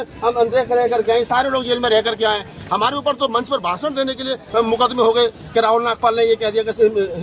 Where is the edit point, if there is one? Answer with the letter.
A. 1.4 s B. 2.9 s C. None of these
C